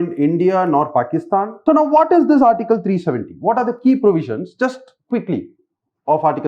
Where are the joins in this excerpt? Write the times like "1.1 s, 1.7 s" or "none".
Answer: 1.5 s

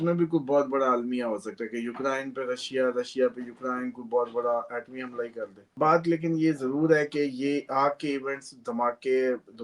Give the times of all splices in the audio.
5.7 s

